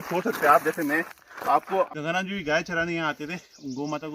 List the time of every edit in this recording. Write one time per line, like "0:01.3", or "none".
0:01.9

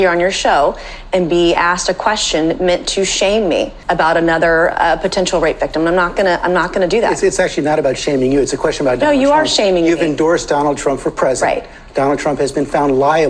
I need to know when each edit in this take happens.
0:03.8

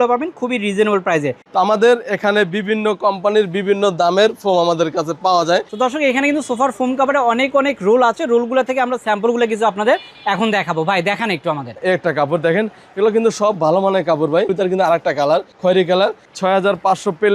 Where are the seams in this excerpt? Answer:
0:01.4
0:05.7
0:11.8
0:14.5

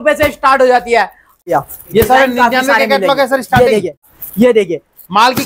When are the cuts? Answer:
0:01.4
0:04.2

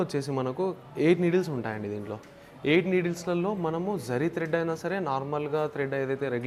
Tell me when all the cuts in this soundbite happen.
none

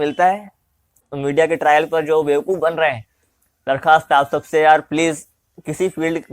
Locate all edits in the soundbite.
0:01.0

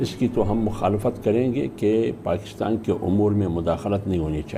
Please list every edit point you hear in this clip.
none

